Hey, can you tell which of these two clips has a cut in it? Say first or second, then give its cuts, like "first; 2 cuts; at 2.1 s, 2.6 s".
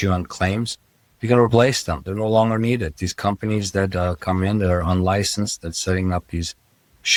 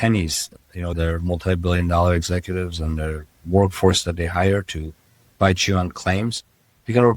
second; 1 cut; at 0.9 s